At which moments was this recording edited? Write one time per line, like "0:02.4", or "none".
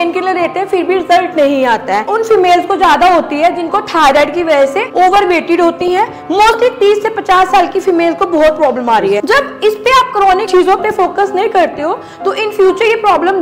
0:02.1
0:09.2
0:10.5